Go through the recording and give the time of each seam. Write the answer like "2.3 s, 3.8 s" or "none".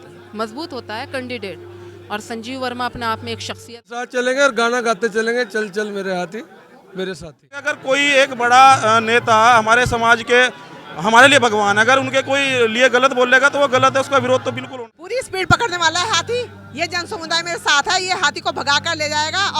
4.1 s, 7.7 s, 14.6 s

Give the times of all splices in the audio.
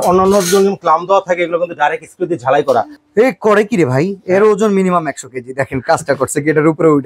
3.0 s

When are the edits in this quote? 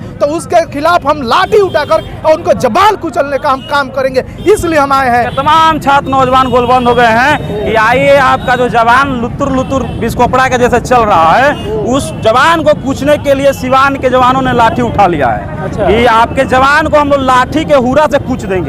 5.3 s

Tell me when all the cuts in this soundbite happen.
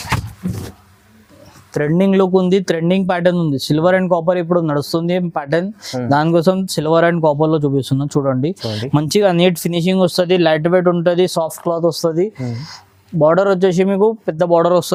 none

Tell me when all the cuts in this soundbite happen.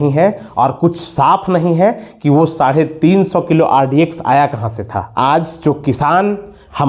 5.0 s

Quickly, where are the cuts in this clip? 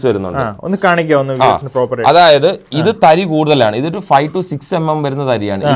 none

